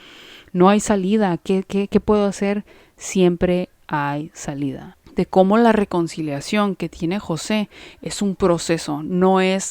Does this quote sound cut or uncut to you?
cut